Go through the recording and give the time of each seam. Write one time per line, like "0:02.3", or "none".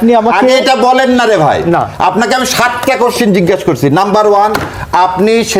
none

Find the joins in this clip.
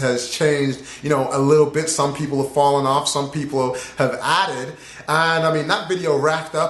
0:02.6

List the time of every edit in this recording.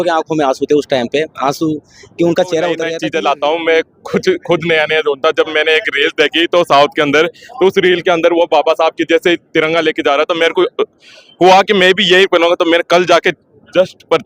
0:02.9

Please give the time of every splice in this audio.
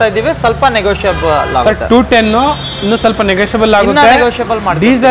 none

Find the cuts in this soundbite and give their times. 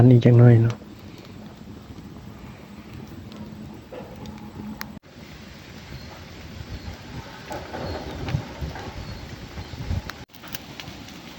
none

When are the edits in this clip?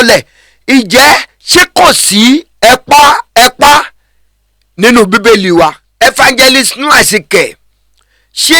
0:05.8

